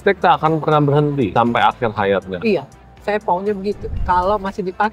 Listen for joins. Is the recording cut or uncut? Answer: uncut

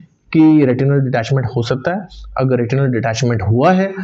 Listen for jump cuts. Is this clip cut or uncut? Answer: uncut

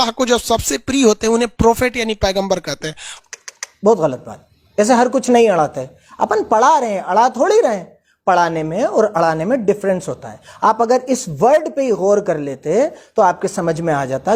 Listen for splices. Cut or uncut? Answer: uncut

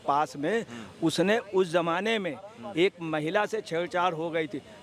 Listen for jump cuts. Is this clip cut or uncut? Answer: uncut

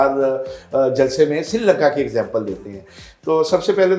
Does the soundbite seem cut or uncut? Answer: uncut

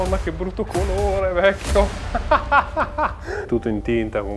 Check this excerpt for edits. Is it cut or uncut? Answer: cut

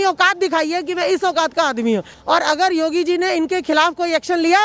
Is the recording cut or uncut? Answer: cut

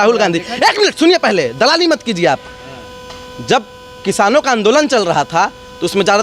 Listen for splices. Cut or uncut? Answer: uncut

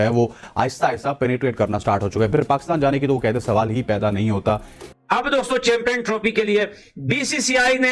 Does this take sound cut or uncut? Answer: cut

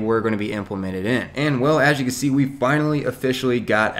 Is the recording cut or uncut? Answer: cut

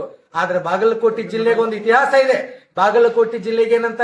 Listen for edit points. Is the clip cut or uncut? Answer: uncut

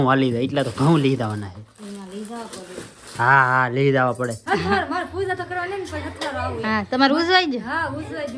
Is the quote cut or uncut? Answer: cut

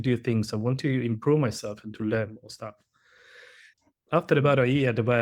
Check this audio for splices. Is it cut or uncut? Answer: cut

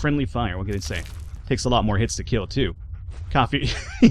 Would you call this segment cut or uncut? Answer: cut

